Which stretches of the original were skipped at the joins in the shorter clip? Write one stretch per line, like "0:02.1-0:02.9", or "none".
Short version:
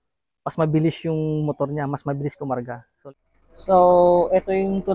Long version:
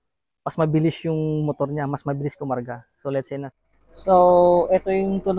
0:03.0-0:03.4